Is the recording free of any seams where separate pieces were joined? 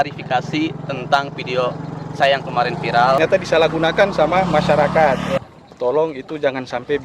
no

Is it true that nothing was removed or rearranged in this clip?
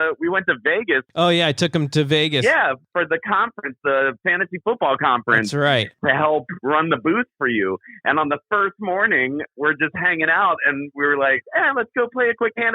no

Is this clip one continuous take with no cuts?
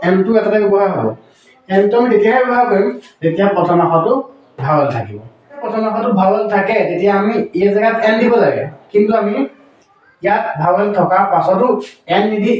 no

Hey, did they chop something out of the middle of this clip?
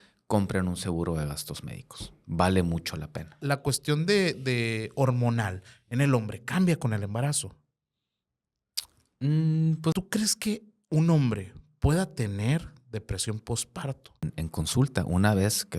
yes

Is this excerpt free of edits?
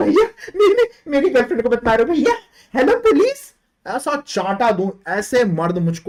yes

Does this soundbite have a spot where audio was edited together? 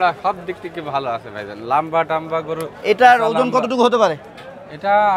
no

